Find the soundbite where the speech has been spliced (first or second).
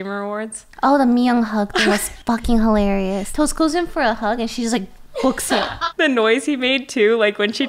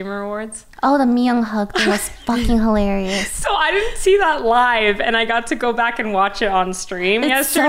first